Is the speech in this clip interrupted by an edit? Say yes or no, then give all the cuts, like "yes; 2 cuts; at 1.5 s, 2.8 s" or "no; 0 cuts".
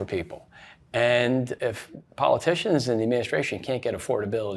yes; 1 cut; at 1.5 s